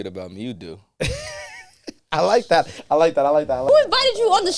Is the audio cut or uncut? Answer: cut